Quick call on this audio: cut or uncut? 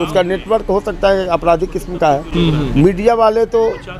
cut